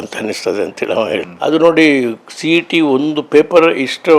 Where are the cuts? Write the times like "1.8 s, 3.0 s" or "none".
1.3 s